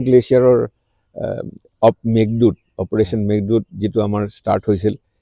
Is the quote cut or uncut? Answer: uncut